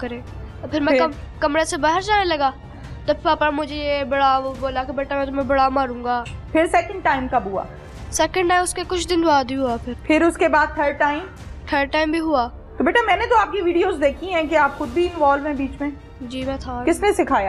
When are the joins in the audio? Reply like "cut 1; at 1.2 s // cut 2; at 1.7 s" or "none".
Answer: cut 1; at 6.3 s // cut 2; at 9.9 s // cut 3; at 12.6 s